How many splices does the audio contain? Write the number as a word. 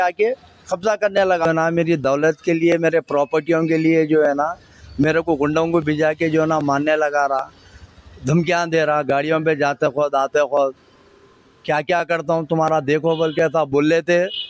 one